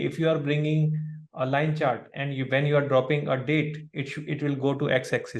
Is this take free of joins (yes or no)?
yes